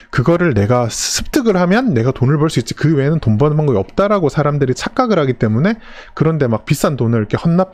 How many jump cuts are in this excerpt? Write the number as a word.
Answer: zero